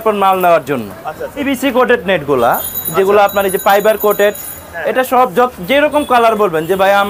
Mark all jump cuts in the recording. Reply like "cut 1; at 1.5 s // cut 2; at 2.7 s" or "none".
cut 1; at 1.4 s